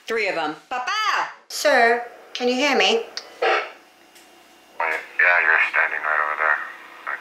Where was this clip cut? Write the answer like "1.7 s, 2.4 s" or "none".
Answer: 1.4 s